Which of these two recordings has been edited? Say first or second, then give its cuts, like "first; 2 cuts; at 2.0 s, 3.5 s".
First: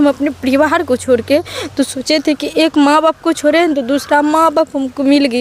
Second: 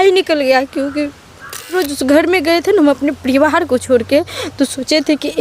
second; 1 cut; at 1.7 s